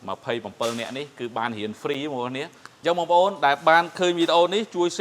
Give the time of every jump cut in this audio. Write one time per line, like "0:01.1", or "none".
0:02.6